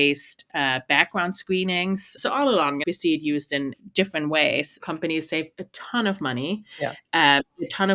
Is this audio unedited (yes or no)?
no